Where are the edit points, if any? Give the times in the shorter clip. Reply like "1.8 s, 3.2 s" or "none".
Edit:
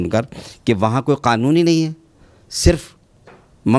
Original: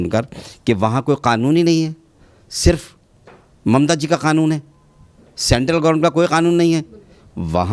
none